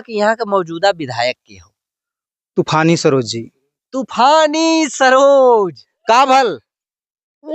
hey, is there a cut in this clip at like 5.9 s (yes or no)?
yes